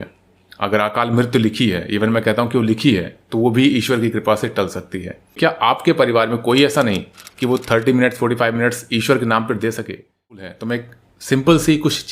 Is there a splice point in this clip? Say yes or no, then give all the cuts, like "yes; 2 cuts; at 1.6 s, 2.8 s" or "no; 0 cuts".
yes; 2 cuts; at 5.4 s, 10.5 s